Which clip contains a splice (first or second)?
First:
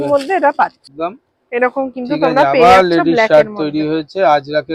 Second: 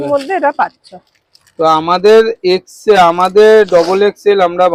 first